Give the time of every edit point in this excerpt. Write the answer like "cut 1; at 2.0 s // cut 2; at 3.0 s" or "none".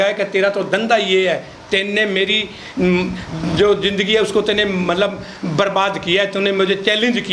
none